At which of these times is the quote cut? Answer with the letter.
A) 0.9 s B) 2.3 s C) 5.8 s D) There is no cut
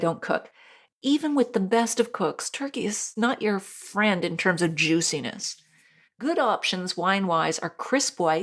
A